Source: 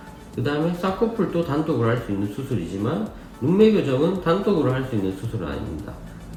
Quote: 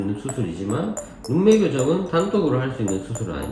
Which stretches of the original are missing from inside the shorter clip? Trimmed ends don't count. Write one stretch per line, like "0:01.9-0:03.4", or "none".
none